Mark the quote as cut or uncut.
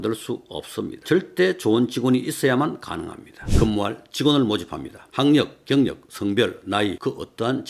cut